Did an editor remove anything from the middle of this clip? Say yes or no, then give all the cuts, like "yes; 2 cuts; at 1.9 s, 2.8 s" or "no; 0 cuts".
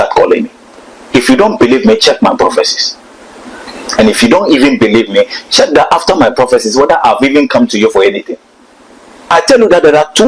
yes; 2 cuts; at 0.9 s, 9.3 s